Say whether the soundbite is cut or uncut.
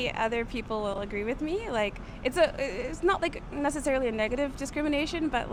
uncut